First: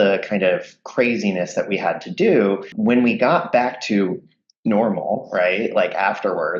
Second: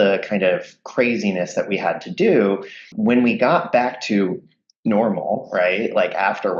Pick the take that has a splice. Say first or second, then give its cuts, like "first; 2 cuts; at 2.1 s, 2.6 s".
first; 1 cut; at 2.7 s